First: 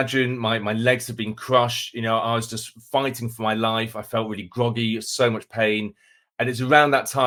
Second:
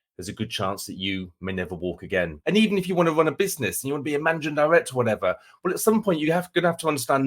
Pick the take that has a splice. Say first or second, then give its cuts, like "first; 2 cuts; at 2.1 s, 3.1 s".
second; 1 cut; at 2.4 s